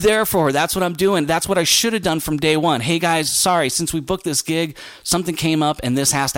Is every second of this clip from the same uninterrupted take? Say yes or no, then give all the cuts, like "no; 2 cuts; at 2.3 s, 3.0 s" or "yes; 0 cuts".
yes; 0 cuts